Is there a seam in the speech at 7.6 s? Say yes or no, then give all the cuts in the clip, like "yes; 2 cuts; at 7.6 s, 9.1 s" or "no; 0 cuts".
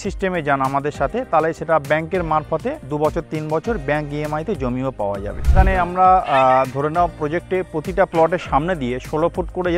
no; 2 cuts; at 2.8 s, 5.5 s